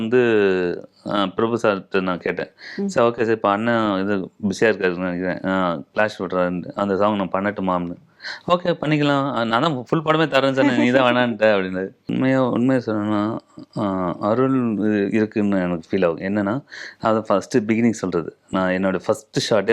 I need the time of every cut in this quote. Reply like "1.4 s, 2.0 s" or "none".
12.1 s